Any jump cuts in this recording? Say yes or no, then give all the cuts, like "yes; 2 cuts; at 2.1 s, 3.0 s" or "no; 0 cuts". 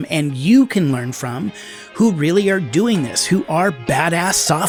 no; 0 cuts